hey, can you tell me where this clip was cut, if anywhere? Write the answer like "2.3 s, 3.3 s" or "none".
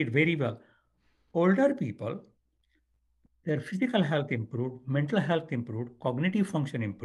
none